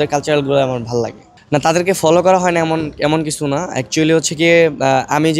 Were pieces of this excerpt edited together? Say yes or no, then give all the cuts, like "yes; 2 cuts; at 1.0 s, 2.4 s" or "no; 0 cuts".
no; 0 cuts